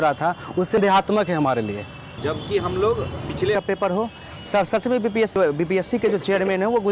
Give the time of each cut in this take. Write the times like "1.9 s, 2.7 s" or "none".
0.8 s, 3.5 s, 5.3 s